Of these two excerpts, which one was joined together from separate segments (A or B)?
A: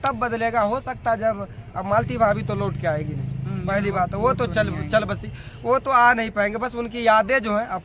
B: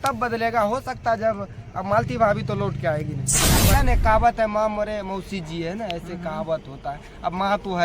B